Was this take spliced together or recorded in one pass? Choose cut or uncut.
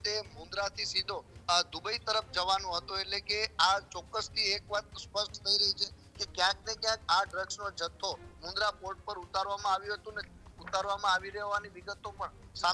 uncut